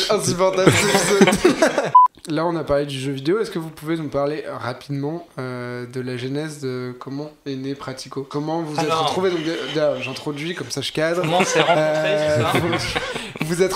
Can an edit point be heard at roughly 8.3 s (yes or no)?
yes